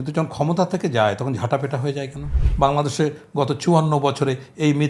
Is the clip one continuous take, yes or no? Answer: no